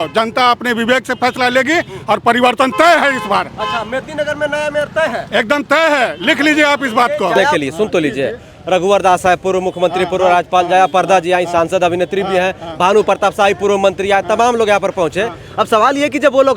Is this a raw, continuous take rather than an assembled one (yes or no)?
no